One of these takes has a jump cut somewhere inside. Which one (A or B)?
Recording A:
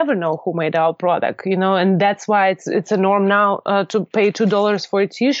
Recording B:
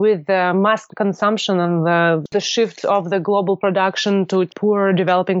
B